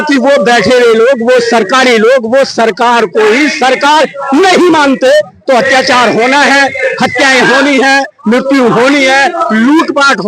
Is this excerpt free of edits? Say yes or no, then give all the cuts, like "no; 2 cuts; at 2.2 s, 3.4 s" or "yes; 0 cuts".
yes; 0 cuts